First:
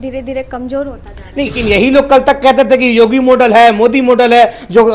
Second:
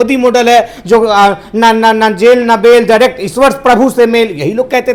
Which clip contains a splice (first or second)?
first